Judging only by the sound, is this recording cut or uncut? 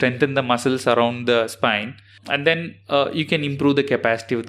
cut